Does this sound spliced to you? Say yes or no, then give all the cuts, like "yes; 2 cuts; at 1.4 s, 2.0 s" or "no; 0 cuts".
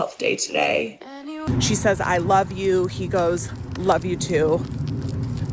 yes; 1 cut; at 1.4 s